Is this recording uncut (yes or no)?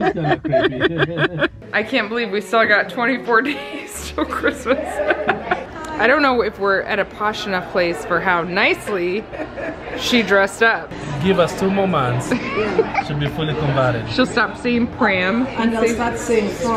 no